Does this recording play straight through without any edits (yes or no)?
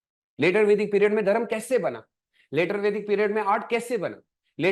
yes